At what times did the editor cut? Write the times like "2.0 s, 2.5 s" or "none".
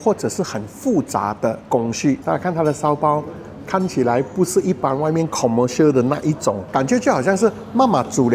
2.2 s, 6.5 s